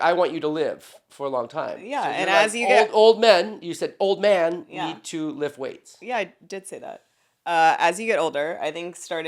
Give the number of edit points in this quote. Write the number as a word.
zero